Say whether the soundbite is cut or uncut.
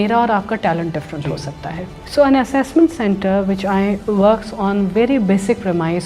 cut